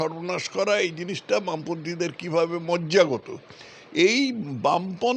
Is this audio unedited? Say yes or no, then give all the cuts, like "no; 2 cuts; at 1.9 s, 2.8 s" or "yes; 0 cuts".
yes; 0 cuts